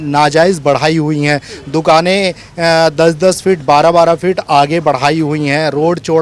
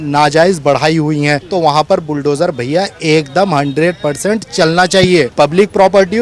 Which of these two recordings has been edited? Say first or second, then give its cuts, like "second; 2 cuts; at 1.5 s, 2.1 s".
second; 2 cuts; at 1.4 s, 5.3 s